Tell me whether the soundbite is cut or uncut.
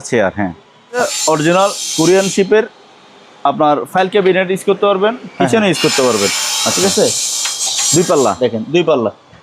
cut